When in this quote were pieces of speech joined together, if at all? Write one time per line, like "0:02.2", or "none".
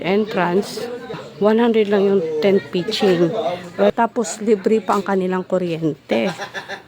0:01.2
0:03.9